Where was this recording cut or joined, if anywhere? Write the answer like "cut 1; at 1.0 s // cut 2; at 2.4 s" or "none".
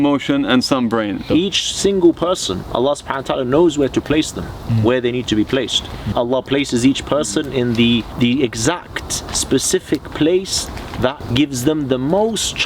cut 1; at 1.2 s // cut 2; at 6.1 s // cut 3; at 8.1 s // cut 4; at 11.2 s